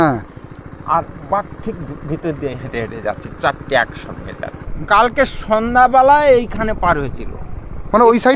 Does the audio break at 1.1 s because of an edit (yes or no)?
no